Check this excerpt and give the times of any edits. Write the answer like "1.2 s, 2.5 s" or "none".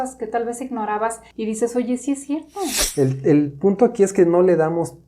1.3 s, 2.8 s